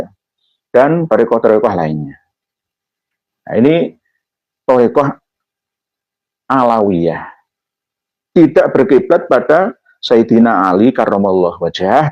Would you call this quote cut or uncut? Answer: uncut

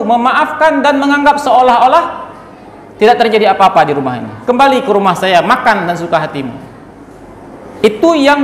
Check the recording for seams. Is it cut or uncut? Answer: uncut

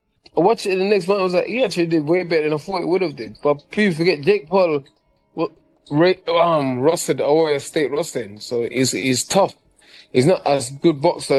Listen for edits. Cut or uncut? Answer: uncut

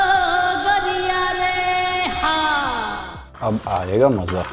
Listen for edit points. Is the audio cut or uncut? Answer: cut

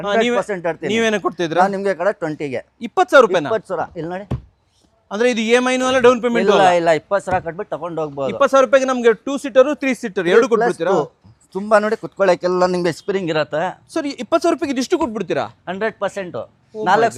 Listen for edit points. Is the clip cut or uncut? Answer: uncut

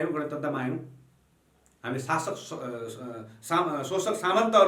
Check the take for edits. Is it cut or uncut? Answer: uncut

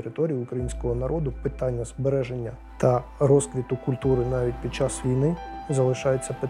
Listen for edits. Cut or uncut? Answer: cut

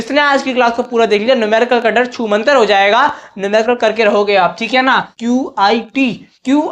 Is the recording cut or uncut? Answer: cut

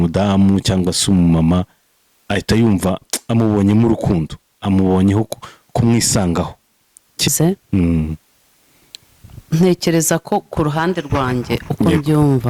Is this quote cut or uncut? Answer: cut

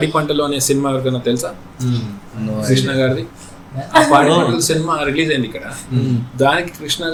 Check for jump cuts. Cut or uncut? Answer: uncut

